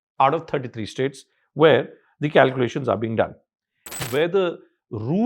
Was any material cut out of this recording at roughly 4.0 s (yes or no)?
yes